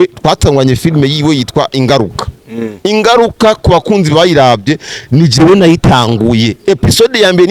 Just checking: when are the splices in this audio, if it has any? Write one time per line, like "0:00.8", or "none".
none

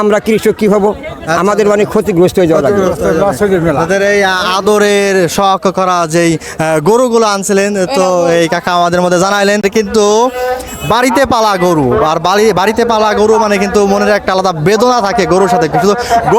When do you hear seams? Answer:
0:09.6

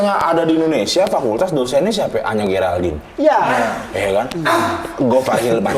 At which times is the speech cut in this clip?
none

